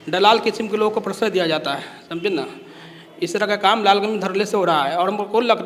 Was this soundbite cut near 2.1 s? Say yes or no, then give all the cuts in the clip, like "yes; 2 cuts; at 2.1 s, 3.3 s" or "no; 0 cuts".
no; 0 cuts